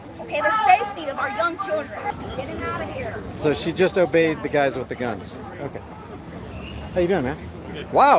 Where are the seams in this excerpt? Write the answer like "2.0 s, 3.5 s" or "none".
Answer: 2.1 s